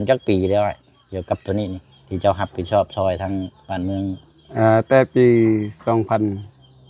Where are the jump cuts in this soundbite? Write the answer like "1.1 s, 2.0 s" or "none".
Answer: none

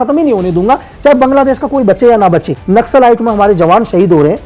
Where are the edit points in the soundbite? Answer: 2.5 s

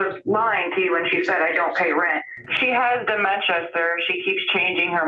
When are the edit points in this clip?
2.5 s

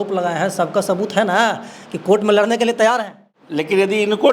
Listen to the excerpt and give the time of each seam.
2.9 s

